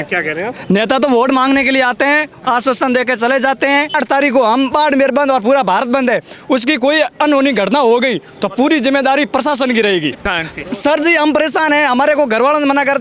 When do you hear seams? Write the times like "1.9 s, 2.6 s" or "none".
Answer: 4.0 s, 10.2 s